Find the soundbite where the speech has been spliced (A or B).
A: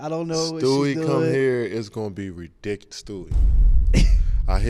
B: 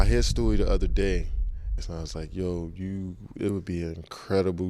B